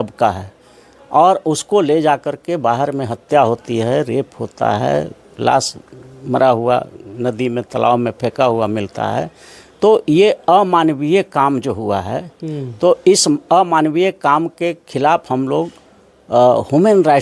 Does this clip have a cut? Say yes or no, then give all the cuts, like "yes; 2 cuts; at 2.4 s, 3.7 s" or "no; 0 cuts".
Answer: no; 0 cuts